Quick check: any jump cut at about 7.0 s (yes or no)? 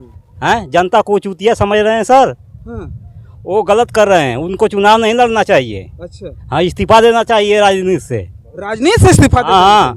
no